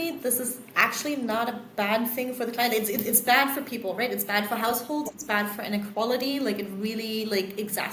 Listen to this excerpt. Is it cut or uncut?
uncut